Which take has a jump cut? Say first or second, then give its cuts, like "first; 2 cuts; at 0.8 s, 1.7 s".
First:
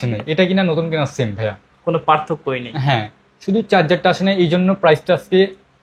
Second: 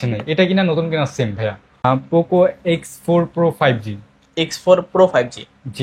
second; 1 cut; at 1.9 s